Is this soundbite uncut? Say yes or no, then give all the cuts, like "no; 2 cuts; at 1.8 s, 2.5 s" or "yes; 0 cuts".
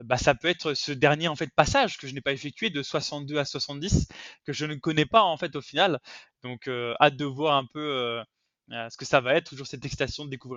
yes; 0 cuts